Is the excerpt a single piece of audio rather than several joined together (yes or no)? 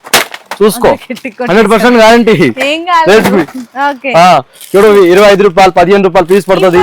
yes